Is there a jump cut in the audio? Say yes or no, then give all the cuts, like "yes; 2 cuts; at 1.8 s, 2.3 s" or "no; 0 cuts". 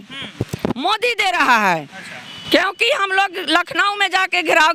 no; 0 cuts